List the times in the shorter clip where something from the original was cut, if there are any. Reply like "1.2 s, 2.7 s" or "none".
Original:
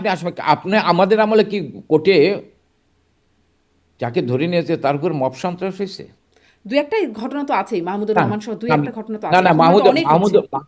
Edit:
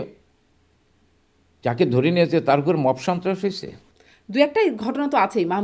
none